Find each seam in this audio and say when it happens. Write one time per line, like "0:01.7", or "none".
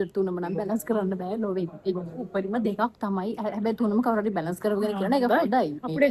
none